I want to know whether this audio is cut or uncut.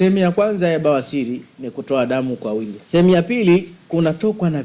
cut